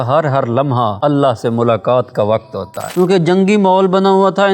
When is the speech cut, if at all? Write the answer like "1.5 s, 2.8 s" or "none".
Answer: 1.0 s, 2.8 s